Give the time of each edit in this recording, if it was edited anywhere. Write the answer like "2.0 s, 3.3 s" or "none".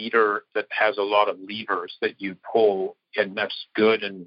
none